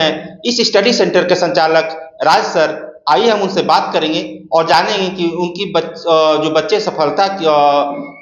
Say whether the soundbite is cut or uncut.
uncut